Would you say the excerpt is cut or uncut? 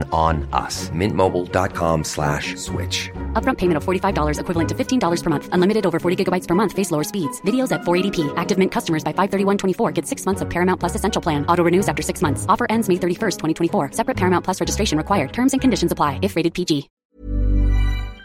cut